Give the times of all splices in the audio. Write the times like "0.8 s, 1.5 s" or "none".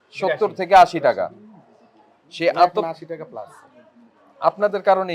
none